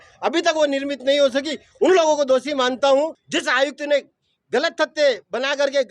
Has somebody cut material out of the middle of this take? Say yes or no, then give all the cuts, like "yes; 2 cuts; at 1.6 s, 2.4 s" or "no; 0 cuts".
yes; 1 cut; at 3.2 s